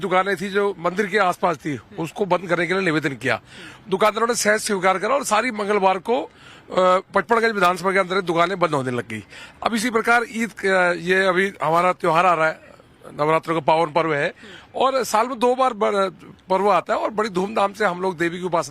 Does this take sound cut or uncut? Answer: cut